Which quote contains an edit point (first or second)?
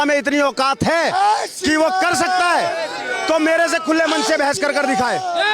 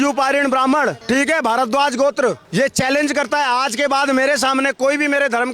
second